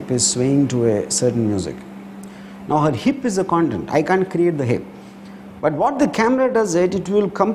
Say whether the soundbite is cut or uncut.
uncut